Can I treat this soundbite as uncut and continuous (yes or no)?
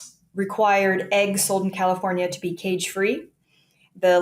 yes